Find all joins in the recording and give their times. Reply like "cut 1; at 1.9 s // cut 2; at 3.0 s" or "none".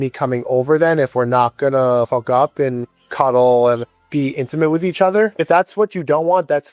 cut 1; at 2.0 s // cut 2; at 2.8 s // cut 3; at 3.8 s // cut 4; at 5.3 s

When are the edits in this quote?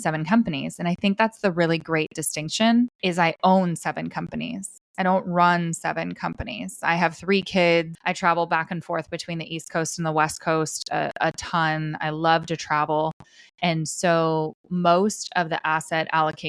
none

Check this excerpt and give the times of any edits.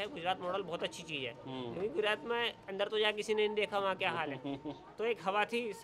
none

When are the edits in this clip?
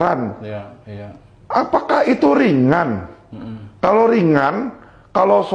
none

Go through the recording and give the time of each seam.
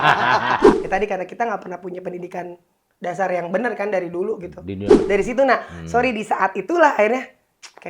cut 1; at 0.8 s // cut 2; at 5.0 s

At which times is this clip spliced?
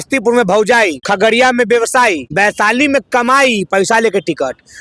cut 1; at 1.0 s // cut 2; at 2.2 s

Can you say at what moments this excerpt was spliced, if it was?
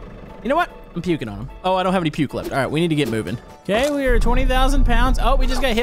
cut 1; at 3.5 s

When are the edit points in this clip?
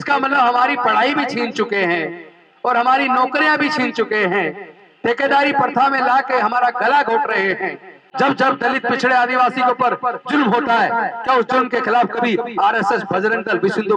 cut 1; at 8.1 s

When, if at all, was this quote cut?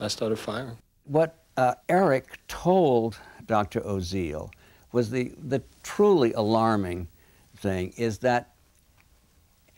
cut 1; at 1.0 s

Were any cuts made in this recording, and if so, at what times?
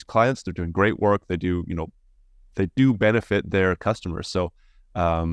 none

